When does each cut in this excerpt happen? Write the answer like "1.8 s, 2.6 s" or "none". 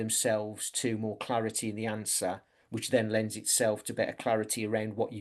none